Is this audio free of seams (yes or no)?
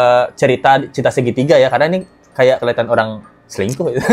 yes